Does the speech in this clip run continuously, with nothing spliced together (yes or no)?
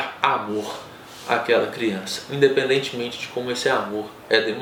yes